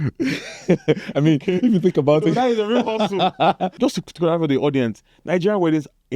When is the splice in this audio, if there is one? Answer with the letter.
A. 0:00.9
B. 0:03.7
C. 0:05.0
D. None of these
B